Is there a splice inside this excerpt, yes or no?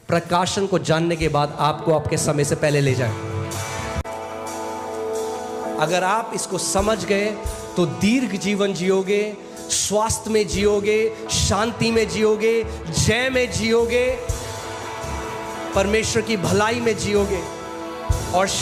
no